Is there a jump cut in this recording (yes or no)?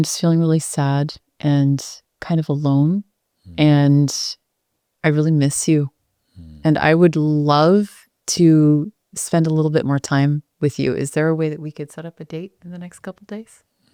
no